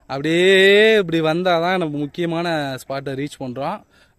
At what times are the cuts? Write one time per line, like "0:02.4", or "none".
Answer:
none